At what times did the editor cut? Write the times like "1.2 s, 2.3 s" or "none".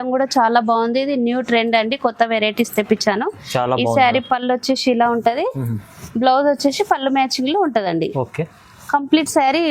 none